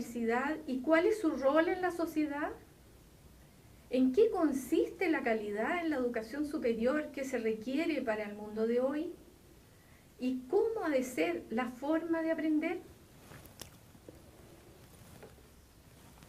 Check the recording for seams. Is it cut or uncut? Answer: cut